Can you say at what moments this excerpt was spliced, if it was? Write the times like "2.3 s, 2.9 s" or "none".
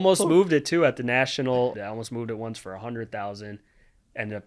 1.8 s